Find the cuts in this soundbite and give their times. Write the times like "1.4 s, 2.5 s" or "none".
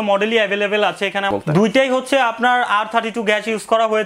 1.3 s